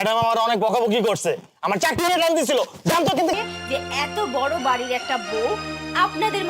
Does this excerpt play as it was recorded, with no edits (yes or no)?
no